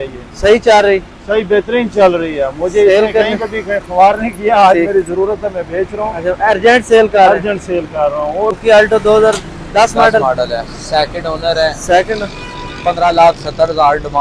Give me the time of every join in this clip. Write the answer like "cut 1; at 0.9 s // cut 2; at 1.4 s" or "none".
cut 1; at 8.6 s